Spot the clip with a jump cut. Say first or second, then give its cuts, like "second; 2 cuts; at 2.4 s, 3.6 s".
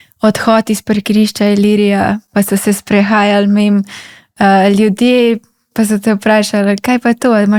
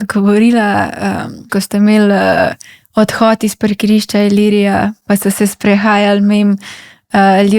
second; 1 cut; at 1.4 s